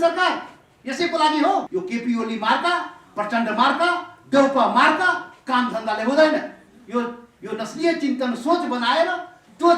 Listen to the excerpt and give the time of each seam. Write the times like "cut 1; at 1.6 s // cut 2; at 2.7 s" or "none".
cut 1; at 1.7 s